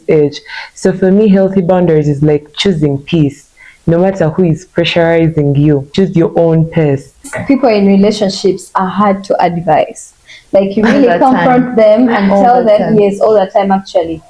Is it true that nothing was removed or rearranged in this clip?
no; 2 cuts; at 5.9 s, 7.3 s

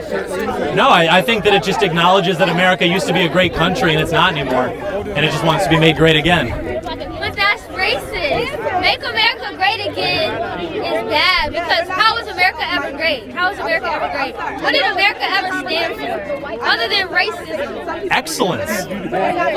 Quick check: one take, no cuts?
yes; 0 cuts

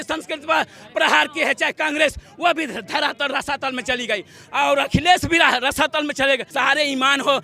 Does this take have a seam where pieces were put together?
yes; 1 cut; at 6.5 s

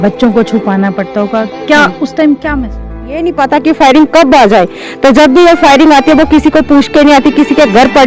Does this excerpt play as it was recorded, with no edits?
no; 1 cut; at 3.3 s

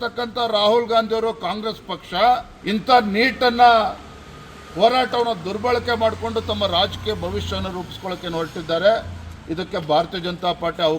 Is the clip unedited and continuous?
no; 1 cut; at 2.5 s

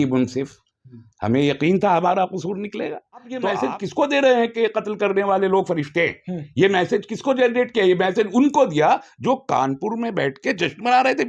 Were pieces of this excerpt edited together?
yes; 1 cut; at 3.5 s

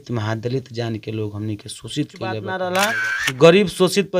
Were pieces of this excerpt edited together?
yes; 1 cut; at 2.7 s

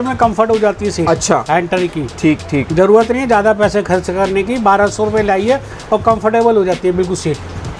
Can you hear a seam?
no; 0 cuts

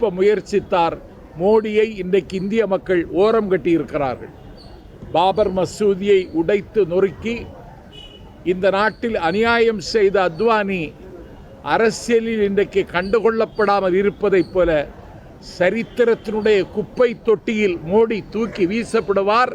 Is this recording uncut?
yes; 0 cuts

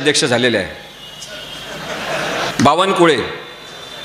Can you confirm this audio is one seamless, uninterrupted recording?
no; 1 cut; at 2.5 s

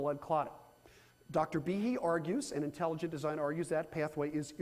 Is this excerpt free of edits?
no; 1 cut; at 3.0 s

